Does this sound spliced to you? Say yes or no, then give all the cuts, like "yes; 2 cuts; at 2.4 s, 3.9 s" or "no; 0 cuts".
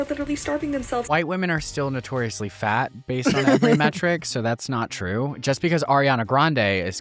yes; 1 cut; at 1.1 s